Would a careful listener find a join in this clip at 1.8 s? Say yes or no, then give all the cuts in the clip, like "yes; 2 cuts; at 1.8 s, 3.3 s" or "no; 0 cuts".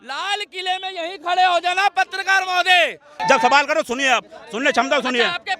no; 1 cut; at 3.1 s